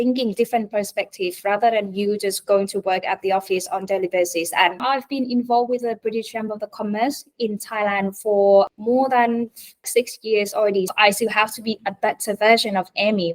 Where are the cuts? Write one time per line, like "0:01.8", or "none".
0:04.8
0:08.7
0:09.9
0:10.9

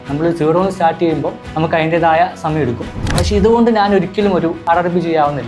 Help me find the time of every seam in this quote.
0:01.4
0:03.0
0:04.6

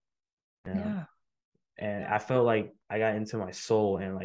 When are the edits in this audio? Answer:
0:02.8

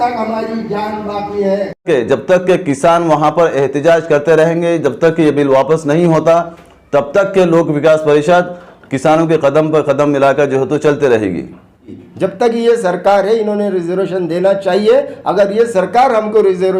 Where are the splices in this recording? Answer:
0:01.8
0:12.0

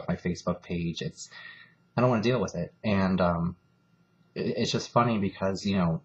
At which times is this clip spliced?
none

